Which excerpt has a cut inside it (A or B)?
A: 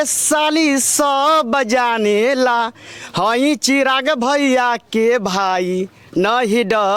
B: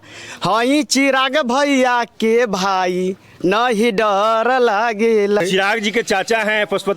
B